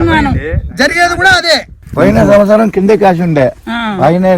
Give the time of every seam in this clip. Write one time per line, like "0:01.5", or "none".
0:01.8